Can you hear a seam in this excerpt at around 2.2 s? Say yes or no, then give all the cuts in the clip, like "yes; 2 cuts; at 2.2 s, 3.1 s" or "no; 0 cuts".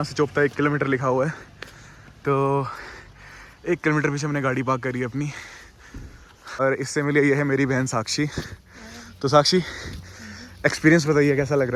no; 0 cuts